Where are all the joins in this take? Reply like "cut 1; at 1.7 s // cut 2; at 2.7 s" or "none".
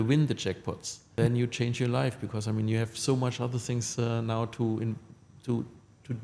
cut 1; at 1.1 s